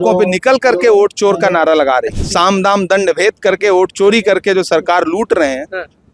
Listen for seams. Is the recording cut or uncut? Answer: cut